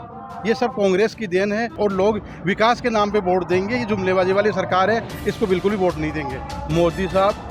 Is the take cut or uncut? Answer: cut